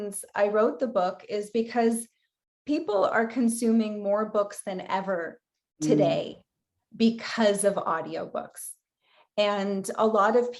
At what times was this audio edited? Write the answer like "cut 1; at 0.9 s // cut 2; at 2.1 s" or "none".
none